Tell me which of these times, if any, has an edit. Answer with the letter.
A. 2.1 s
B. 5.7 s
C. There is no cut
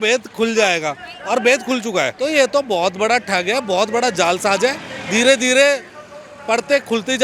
A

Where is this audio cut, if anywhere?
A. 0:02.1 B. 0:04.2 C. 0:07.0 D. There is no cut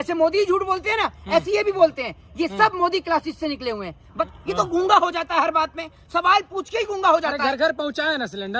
B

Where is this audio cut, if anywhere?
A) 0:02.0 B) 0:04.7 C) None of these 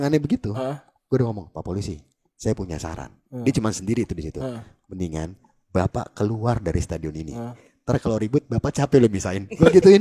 C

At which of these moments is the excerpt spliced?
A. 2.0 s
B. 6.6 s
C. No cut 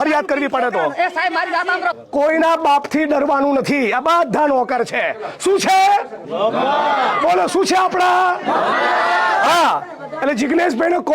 A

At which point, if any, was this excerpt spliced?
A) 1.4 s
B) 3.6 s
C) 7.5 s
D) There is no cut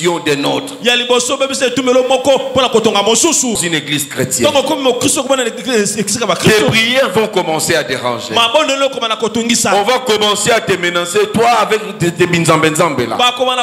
B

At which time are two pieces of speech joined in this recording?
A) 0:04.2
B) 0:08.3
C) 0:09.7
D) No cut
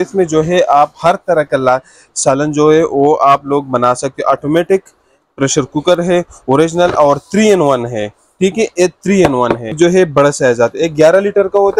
C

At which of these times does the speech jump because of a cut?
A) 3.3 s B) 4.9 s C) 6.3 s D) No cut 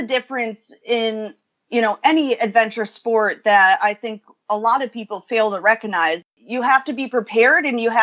C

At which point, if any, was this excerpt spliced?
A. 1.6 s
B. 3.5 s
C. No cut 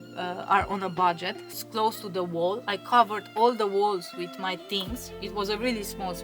A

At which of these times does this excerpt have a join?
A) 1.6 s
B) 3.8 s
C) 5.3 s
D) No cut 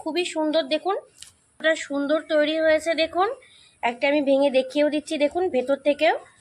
A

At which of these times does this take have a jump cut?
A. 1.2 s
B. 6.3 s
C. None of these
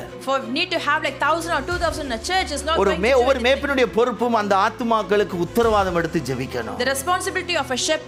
C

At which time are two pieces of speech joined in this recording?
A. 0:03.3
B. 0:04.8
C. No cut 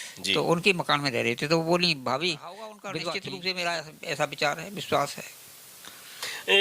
A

